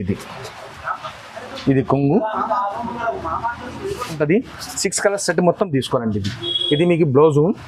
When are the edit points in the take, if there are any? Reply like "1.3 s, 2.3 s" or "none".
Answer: 4.2 s